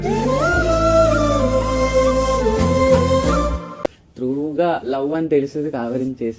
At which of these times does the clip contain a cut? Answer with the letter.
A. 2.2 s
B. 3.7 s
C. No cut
B